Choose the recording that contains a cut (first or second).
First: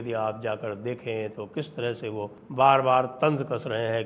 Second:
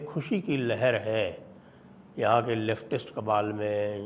first